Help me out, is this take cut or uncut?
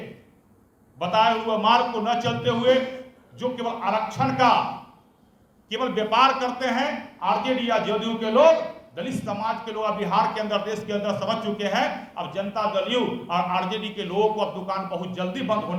uncut